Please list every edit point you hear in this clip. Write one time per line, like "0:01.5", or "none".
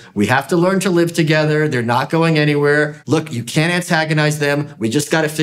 0:03.0